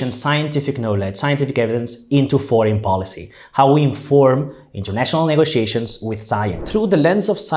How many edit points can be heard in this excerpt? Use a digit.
1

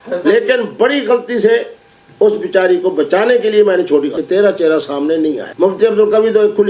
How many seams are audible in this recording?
1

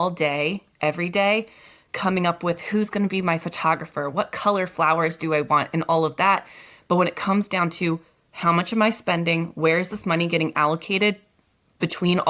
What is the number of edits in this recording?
0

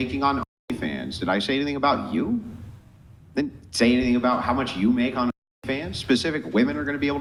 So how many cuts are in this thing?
0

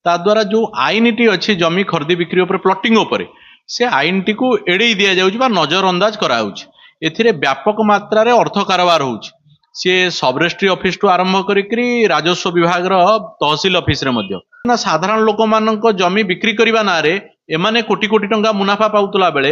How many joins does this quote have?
1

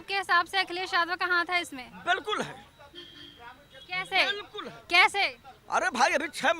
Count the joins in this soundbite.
0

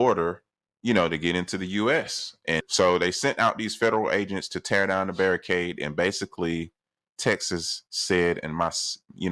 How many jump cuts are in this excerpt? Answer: 1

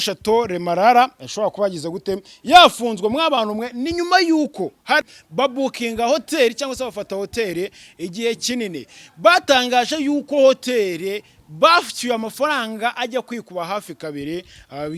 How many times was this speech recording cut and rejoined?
1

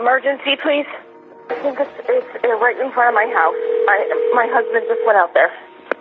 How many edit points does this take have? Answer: 1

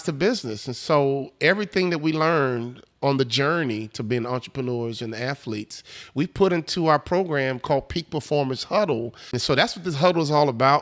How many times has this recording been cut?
1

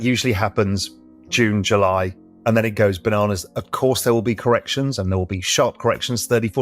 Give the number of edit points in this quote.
1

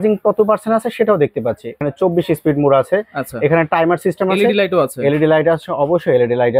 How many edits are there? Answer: 1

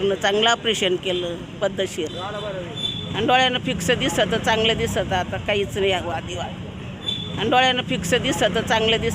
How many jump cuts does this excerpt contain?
2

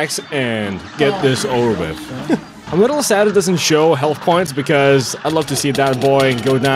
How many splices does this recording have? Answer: 1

